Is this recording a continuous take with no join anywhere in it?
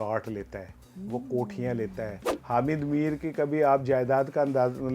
no; 1 cut; at 2.3 s

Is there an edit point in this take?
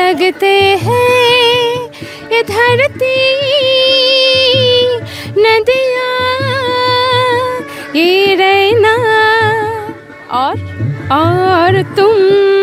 no; 0 cuts

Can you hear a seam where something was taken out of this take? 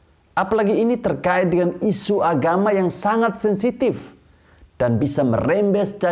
no; 0 cuts

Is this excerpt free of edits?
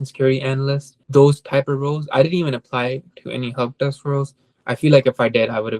no; 1 cut; at 0.9 s

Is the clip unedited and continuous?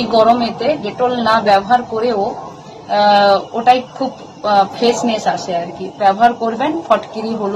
yes; 0 cuts

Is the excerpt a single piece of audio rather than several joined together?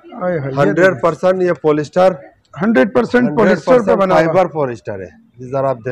yes; 0 cuts

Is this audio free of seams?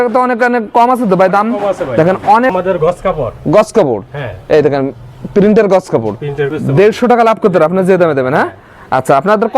no; 2 cuts; at 2.5 s, 6.5 s

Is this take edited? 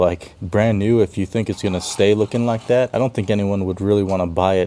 yes; 1 cut; at 2.9 s

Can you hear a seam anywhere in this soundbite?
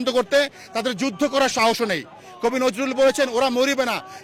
no; 0 cuts

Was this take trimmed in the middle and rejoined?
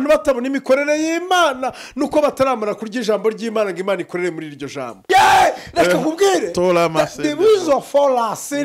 yes; 1 cut; at 5.0 s

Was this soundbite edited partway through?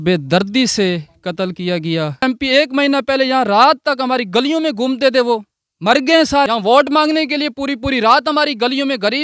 yes; 2 cuts; at 2.2 s, 6.5 s

